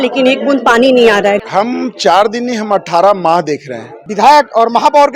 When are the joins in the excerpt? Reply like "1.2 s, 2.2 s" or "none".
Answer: 1.4 s, 4.1 s